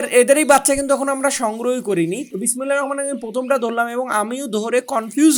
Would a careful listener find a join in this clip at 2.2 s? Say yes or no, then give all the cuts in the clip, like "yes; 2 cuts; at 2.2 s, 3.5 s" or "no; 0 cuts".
yes; 1 cut; at 2.2 s